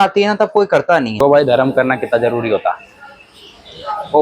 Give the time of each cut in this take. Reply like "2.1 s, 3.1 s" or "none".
1.2 s